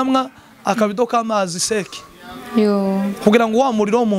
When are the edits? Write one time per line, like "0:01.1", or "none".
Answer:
none